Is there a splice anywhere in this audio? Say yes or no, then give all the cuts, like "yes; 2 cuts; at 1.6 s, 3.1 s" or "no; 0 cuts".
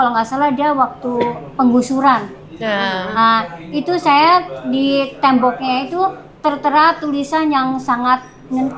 no; 0 cuts